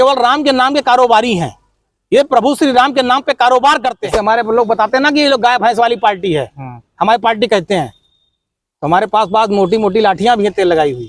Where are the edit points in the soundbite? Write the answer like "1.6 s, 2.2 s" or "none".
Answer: 4.0 s

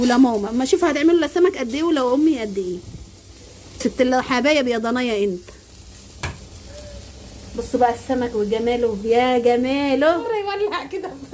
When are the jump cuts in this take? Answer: 10.2 s

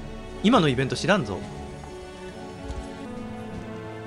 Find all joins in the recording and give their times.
3.1 s

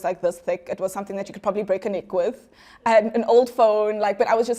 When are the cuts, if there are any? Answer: none

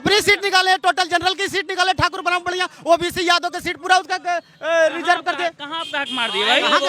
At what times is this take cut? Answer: none

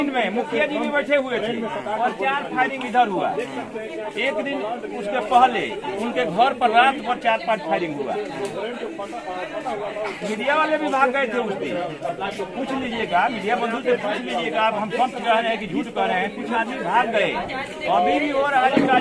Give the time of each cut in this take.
none

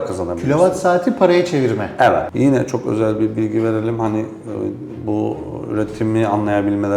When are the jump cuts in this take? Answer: 2.3 s

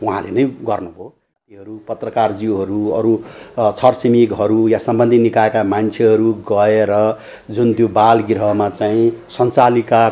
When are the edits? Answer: 1.6 s

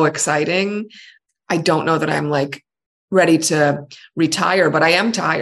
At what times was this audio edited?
1.1 s

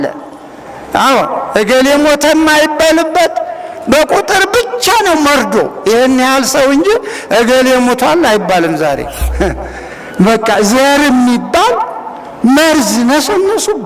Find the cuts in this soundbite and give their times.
9.2 s

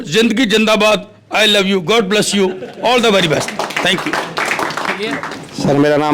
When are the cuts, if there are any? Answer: 5.2 s

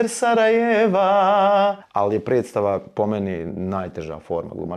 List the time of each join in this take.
1.8 s

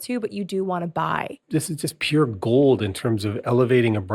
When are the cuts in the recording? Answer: 1.4 s

